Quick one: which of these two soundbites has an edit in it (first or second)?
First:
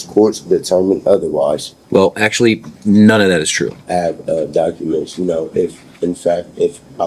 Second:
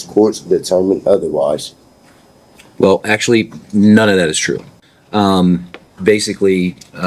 first